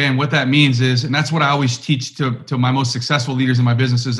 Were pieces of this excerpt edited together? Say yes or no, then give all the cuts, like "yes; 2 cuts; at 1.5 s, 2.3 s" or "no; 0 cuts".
no; 0 cuts